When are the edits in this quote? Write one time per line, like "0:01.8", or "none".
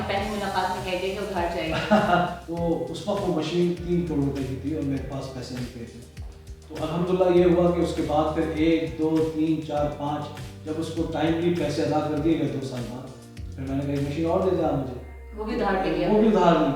0:02.4